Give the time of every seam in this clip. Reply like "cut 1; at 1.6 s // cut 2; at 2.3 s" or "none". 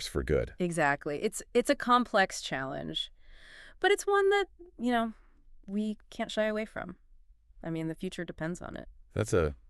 none